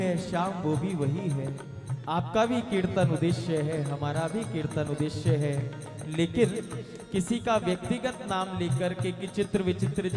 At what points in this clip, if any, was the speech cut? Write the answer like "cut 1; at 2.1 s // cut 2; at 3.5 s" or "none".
none